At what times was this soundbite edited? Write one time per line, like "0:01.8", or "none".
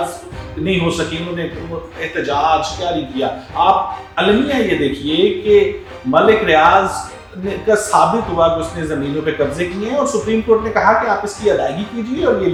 none